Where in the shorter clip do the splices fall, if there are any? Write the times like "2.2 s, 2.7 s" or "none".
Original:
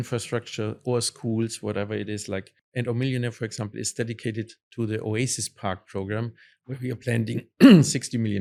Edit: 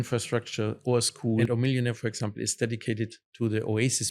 1.5 s